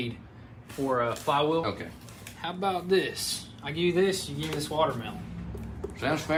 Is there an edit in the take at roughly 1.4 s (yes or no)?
no